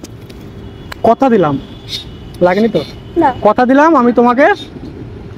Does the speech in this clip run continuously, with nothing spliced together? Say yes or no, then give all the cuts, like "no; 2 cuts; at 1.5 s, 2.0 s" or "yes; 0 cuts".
yes; 0 cuts